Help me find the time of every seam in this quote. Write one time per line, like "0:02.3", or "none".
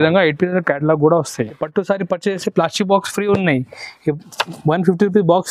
0:01.6